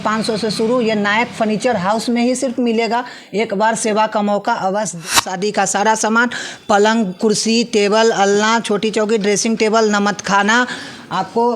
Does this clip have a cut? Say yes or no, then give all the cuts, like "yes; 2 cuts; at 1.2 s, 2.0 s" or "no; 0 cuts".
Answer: yes; 1 cut; at 5.3 s